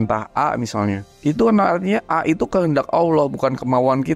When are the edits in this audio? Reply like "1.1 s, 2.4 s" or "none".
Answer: 1.1 s